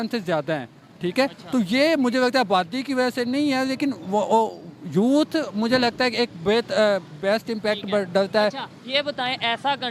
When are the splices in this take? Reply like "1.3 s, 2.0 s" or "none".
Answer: none